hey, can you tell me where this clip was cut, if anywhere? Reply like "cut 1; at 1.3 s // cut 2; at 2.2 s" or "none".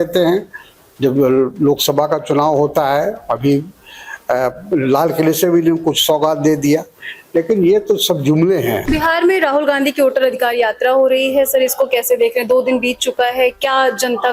cut 1; at 8.8 s